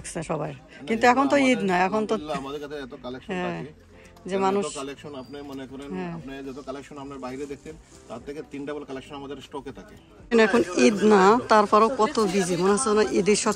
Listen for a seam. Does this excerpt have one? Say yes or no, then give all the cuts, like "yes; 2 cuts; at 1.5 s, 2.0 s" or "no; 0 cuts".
yes; 1 cut; at 10.2 s